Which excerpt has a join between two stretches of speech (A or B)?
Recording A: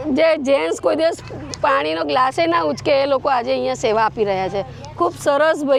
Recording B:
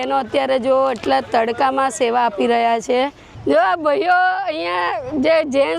B